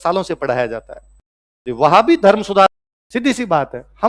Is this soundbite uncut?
no; 1 cut; at 2.7 s

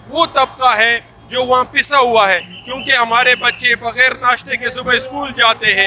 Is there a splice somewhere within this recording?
no; 0 cuts

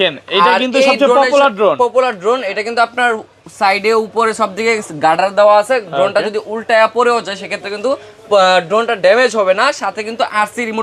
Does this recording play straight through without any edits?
yes; 0 cuts

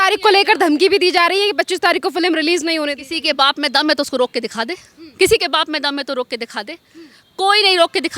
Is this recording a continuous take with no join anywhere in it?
yes; 0 cuts

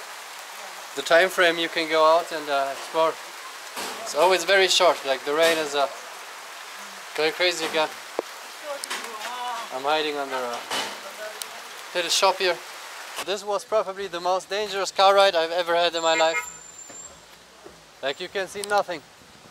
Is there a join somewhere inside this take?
yes; 1 cut; at 13.2 s

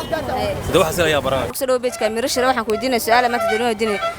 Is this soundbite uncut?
yes; 0 cuts

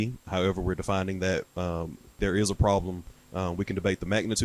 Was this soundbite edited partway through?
yes; 1 cut; at 2.2 s

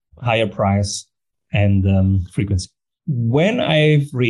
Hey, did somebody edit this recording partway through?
no; 0 cuts

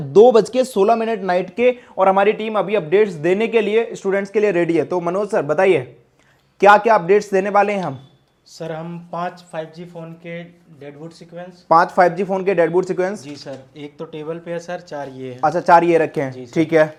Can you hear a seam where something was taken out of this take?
no; 0 cuts

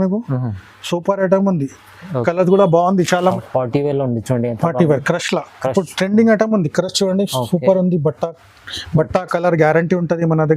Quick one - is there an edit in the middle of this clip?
yes; 1 cut; at 3.4 s

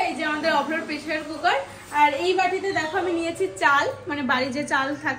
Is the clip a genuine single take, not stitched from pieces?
yes; 0 cuts

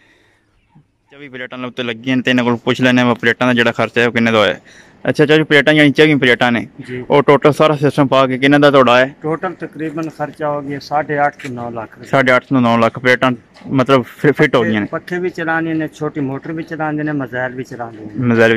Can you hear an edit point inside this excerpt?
yes; 1 cut; at 1.3 s

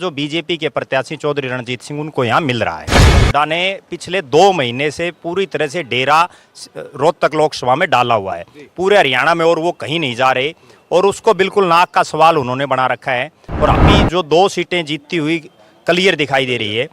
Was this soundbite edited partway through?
yes; 2 cuts; at 3.1 s, 13.8 s

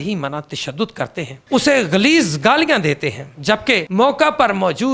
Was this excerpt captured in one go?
yes; 0 cuts

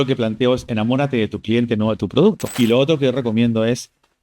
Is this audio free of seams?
no; 1 cut; at 2.5 s

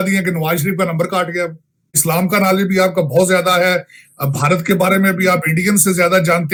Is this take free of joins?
yes; 0 cuts

